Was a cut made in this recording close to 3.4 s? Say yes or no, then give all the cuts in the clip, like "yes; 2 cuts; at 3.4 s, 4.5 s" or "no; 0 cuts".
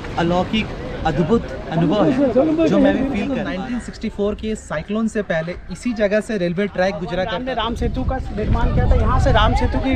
yes; 2 cuts; at 3.4 s, 7.3 s